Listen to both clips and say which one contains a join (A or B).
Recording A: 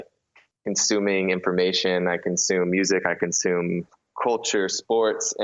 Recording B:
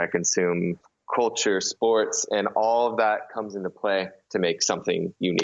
B